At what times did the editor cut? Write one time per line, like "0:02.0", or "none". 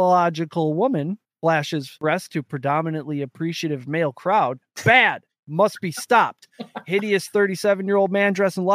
0:01.6